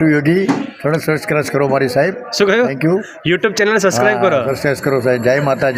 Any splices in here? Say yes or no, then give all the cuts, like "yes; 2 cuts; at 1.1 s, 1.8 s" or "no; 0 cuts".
no; 0 cuts